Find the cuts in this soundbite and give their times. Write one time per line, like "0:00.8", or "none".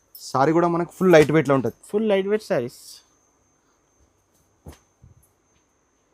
none